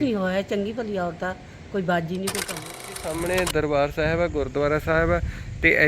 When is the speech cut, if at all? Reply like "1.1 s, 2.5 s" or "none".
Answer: 2.9 s